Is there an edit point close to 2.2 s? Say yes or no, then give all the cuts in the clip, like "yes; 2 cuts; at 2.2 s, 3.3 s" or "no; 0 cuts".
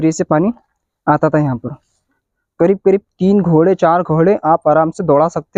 yes; 1 cut; at 2.2 s